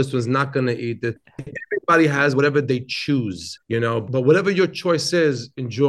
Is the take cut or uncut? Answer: cut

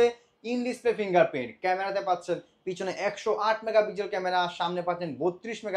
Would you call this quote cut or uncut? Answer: uncut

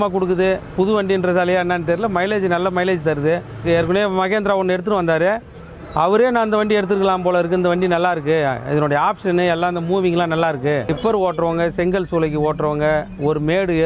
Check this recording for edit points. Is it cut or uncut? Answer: cut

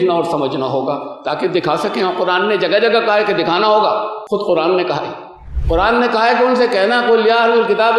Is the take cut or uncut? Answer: cut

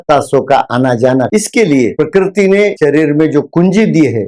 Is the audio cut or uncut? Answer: cut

